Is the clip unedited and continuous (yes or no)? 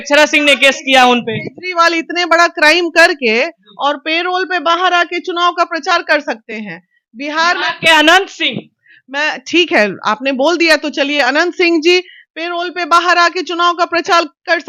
yes